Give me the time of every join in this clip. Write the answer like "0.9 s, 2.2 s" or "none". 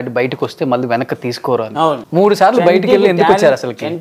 2.0 s